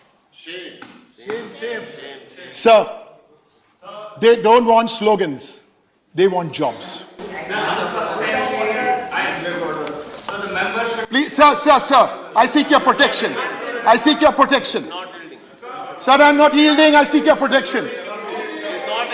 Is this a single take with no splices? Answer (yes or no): yes